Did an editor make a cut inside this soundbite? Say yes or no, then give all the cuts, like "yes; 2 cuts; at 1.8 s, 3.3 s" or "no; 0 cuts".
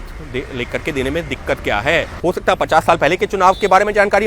yes; 1 cut; at 2.1 s